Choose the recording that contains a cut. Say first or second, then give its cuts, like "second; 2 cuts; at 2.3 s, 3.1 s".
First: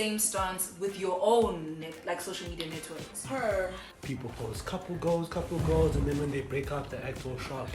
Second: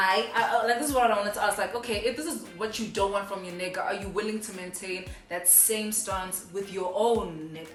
first; 1 cut; at 3.9 s